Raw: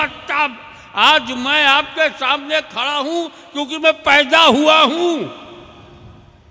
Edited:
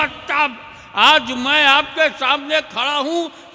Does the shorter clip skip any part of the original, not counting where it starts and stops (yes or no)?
no